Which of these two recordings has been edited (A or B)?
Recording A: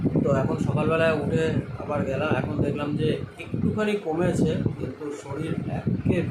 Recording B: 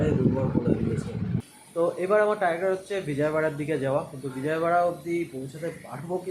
B